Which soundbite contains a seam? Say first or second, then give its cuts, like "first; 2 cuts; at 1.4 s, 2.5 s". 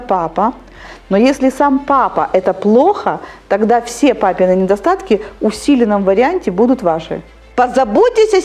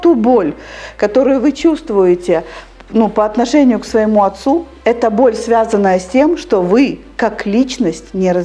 first; 2 cuts; at 0.9 s, 7.4 s